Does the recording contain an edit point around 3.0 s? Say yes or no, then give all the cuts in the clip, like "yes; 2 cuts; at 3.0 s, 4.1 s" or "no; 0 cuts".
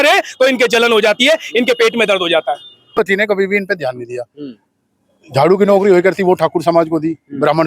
yes; 1 cut; at 3.0 s